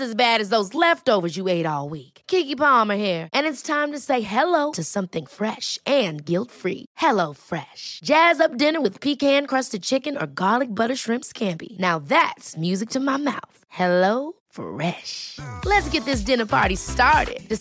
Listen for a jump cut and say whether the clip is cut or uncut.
uncut